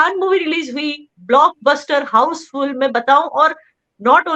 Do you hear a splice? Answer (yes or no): no